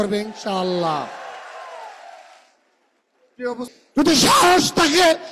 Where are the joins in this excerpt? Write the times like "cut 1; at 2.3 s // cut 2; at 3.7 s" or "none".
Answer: cut 1; at 3.7 s